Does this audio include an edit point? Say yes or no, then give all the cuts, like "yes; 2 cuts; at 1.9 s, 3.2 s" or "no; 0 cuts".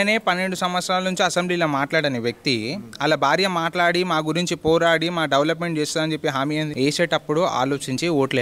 yes; 1 cut; at 6.7 s